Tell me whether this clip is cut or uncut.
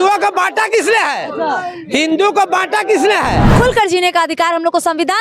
cut